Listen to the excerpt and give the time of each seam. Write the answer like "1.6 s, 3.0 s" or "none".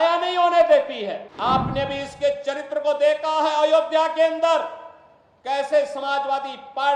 1.3 s